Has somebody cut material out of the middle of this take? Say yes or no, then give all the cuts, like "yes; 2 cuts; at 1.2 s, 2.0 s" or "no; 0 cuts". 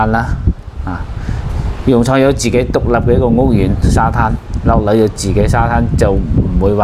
no; 0 cuts